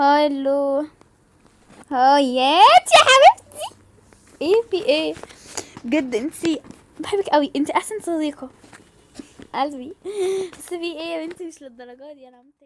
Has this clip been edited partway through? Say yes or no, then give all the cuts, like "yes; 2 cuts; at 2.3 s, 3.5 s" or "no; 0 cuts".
no; 0 cuts